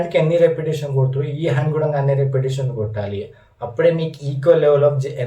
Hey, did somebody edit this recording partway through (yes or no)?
no